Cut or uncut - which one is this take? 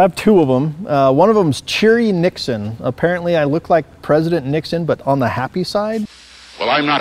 cut